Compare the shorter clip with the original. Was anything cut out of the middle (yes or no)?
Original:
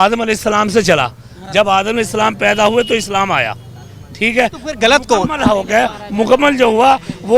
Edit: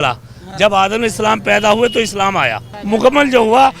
yes